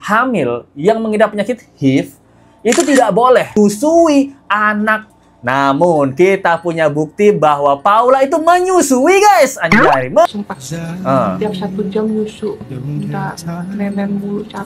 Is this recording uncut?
no; 3 cuts; at 3.6 s, 5.0 s, 10.3 s

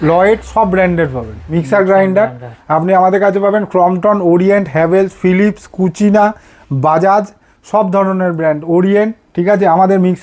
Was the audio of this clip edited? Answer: yes; 2 cuts; at 1.4 s, 9.2 s

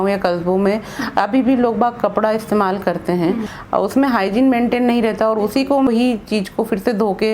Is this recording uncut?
no; 2 cuts; at 3.5 s, 5.9 s

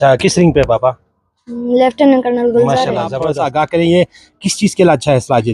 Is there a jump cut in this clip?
yes; 1 cut; at 3.2 s

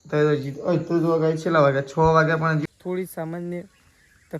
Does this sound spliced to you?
yes; 1 cut; at 2.6 s

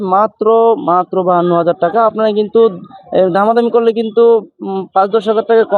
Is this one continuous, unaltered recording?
yes; 0 cuts

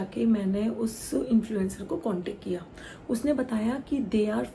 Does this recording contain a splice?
no; 0 cuts

